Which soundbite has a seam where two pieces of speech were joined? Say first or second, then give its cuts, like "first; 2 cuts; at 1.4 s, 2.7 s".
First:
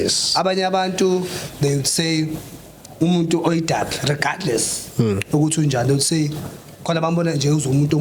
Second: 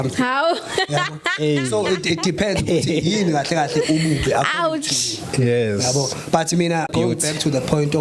second; 1 cut; at 6.9 s